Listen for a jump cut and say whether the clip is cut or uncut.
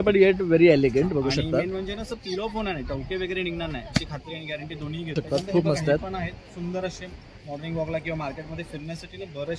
cut